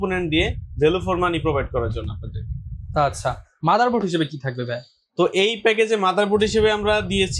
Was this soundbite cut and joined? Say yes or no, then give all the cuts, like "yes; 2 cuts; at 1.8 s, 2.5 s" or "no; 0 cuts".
no; 0 cuts